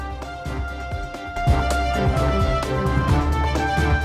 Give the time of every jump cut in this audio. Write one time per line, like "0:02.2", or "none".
0:01.3